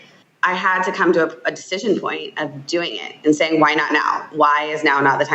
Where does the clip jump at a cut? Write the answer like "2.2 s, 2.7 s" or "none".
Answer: none